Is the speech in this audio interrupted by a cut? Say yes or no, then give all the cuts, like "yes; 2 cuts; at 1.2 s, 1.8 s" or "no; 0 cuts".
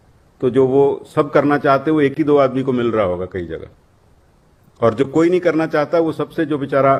no; 0 cuts